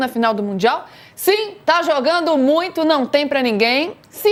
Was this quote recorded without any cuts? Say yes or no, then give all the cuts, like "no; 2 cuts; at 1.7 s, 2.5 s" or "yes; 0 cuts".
yes; 0 cuts